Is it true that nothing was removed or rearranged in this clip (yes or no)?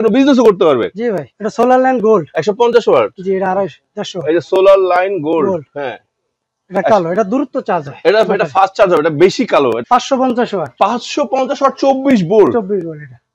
no